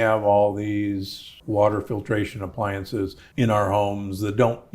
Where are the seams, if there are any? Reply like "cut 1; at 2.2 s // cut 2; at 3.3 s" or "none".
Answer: cut 1; at 3.2 s